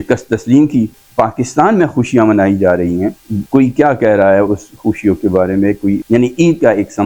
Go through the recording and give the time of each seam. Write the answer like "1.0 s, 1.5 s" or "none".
1.0 s, 3.3 s, 6.0 s